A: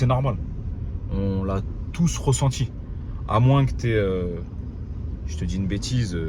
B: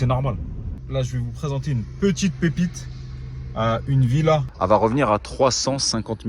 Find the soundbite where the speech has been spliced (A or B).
B